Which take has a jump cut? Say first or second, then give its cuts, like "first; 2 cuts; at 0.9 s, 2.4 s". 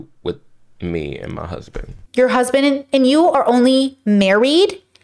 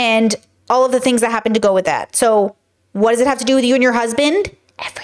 first; 1 cut; at 2.0 s